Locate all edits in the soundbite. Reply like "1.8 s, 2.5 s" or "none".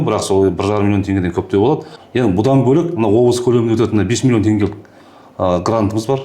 2.0 s